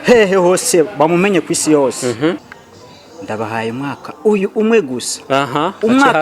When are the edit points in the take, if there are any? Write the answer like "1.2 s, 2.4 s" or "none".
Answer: 2.5 s